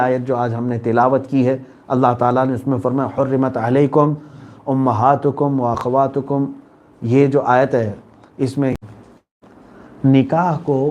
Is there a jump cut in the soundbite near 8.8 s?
yes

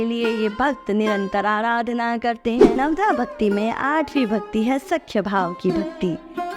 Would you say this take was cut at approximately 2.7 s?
yes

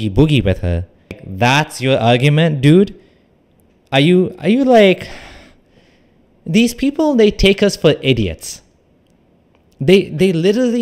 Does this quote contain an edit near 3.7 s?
no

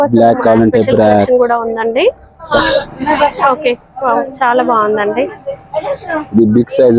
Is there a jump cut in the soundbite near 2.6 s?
yes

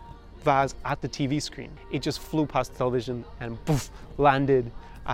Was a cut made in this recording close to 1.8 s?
yes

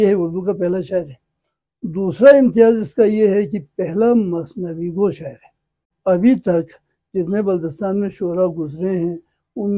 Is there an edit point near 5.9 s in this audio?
yes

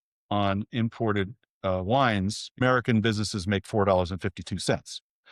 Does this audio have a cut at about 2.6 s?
yes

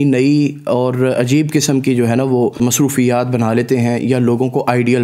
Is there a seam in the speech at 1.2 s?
no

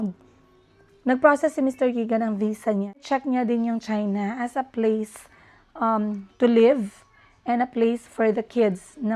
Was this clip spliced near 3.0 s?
yes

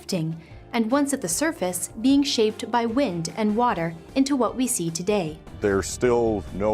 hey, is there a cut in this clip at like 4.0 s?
no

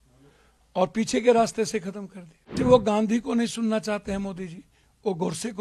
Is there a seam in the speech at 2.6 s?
yes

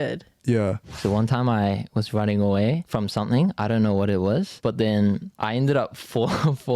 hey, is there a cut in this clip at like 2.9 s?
yes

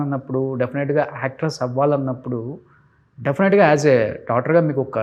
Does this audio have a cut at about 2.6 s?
no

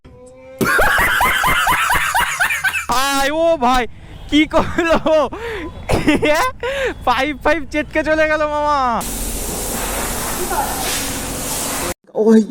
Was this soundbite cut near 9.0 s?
yes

